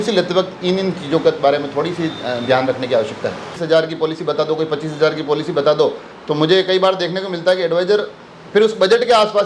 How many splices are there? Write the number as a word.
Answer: one